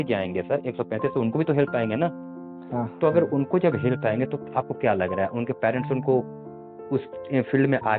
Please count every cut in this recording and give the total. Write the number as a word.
zero